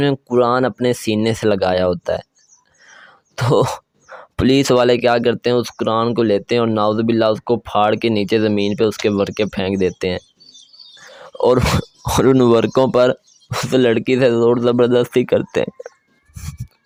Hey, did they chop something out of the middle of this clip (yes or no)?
no